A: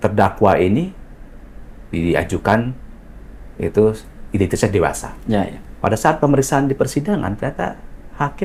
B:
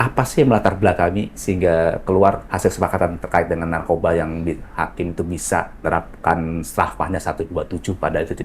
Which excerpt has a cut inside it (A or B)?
B